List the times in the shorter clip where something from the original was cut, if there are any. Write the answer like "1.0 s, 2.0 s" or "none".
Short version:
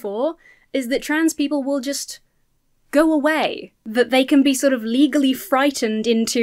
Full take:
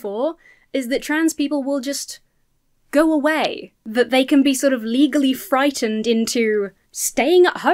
none

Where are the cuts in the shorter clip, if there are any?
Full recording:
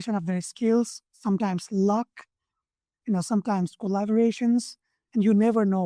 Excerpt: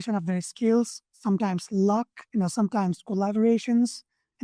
2.2 s

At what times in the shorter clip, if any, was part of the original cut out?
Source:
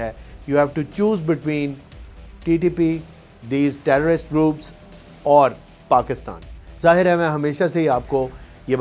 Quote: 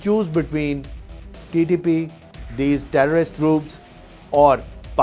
none

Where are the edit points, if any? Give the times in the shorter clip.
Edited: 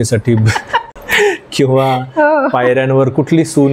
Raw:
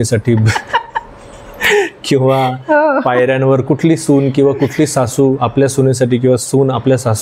1.0 s

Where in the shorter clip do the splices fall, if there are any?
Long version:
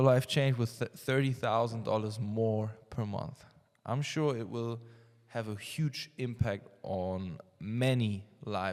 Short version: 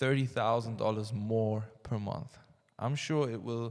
none

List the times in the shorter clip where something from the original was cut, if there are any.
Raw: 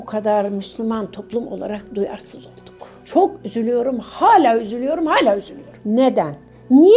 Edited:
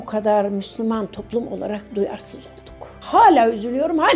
3.0 s

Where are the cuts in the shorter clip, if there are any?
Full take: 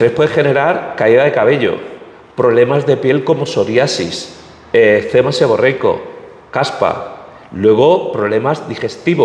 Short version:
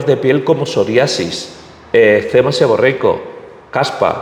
none

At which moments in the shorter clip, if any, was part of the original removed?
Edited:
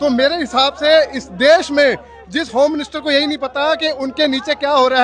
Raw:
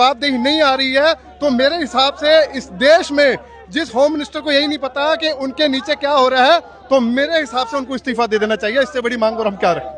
none

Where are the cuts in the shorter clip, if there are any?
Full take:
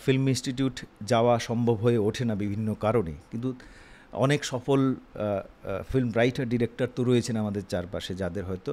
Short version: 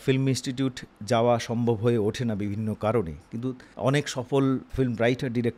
3.7 s, 4.7 s

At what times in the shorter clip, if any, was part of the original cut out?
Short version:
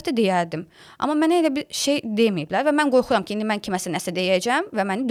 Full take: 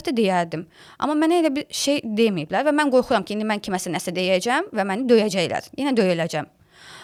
none

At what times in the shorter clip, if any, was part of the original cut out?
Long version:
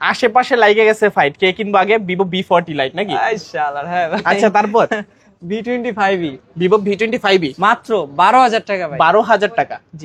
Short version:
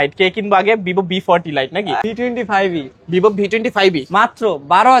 2.0 s

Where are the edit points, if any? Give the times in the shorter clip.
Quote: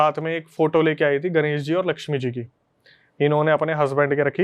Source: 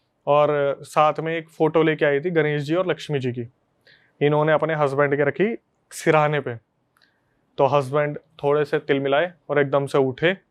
none

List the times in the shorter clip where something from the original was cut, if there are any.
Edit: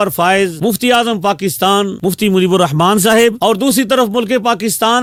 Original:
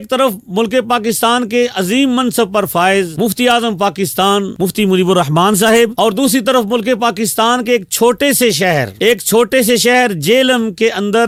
none

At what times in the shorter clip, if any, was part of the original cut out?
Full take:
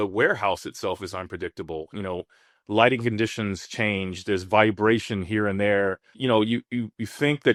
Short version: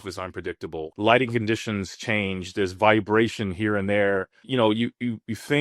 0.9 s

